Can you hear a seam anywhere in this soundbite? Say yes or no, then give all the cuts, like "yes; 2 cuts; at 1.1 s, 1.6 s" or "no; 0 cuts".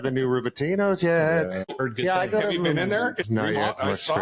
yes; 2 cuts; at 1.7 s, 3.2 s